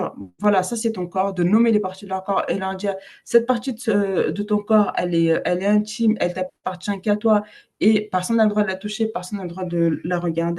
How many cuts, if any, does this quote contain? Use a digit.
0